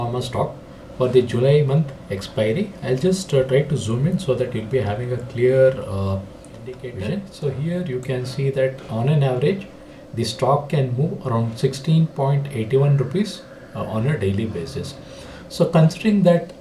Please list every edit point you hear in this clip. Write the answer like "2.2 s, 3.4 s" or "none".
7.3 s